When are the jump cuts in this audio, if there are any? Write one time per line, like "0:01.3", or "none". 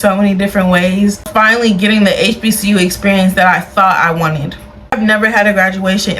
0:01.3
0:04.9